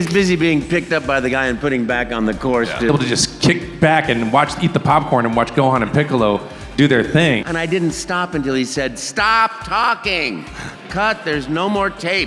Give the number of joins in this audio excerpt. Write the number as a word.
two